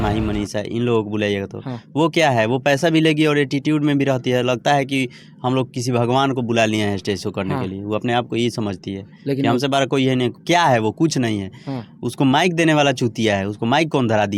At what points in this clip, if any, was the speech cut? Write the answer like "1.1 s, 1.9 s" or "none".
none